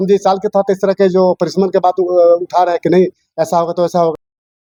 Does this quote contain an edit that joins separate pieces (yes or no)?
no